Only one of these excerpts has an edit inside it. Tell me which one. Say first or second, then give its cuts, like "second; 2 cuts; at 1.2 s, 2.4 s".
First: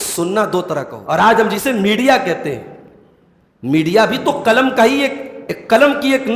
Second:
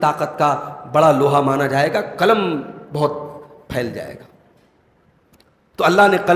first; 1 cut; at 0.9 s